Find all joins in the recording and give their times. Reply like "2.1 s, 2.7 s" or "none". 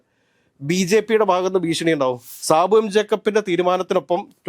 2.3 s